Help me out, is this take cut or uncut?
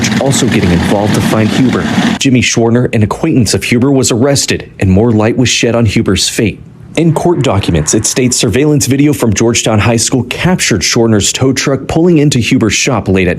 cut